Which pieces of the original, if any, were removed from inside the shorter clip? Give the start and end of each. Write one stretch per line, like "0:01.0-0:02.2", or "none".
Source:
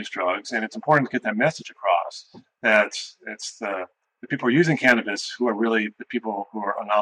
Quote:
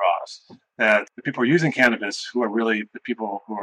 0:03.0-0:04.2